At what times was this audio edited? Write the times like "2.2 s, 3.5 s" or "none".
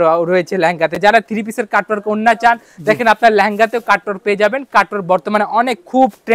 none